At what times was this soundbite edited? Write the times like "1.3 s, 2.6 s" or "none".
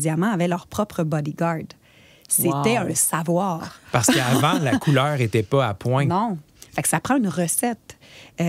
none